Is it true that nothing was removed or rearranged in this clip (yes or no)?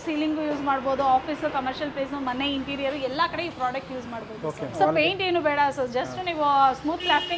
yes